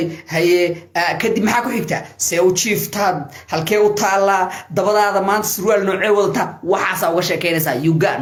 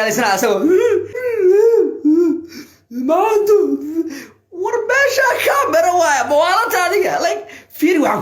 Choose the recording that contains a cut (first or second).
second